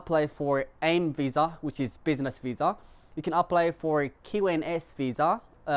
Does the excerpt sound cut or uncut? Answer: uncut